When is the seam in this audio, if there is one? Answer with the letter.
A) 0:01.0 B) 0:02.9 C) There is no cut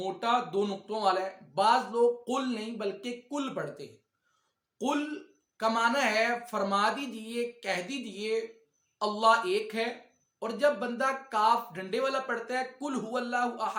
C